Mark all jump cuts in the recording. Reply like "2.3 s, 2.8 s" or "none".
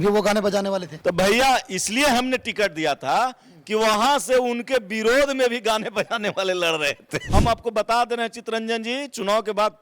0.9 s, 7.2 s